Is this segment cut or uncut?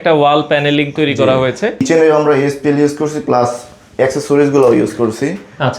cut